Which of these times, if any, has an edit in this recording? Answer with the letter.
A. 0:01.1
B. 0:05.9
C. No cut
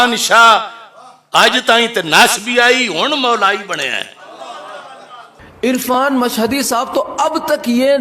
B